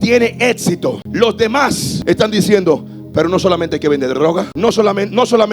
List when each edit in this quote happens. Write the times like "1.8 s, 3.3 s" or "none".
1.0 s, 1.9 s, 4.5 s